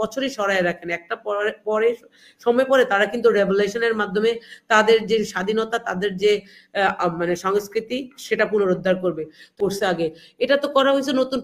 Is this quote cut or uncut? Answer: cut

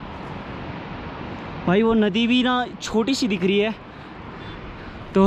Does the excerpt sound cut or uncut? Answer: uncut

